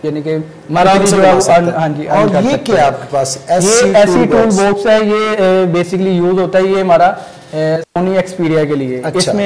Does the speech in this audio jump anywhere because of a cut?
no; 0 cuts

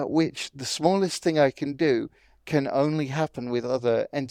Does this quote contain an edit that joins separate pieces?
no; 0 cuts

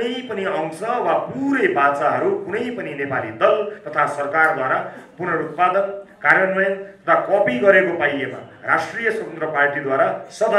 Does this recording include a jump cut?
no; 0 cuts

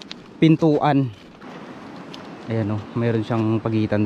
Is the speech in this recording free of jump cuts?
no; 1 cut; at 1.4 s

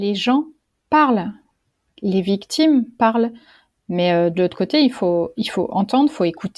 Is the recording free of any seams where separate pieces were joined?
yes; 0 cuts

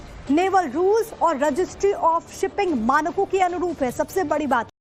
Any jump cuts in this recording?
no; 0 cuts

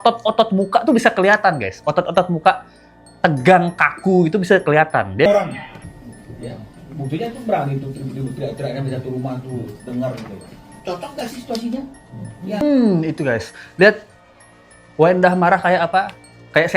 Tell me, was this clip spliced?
yes; 1 cut; at 5.3 s

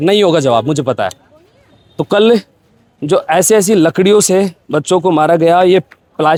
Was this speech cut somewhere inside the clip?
no; 0 cuts

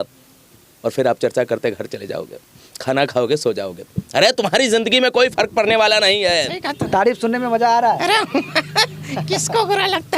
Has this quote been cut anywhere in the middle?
yes; 1 cut; at 6.6 s

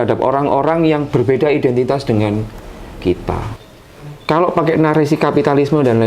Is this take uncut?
no; 1 cut; at 3.6 s

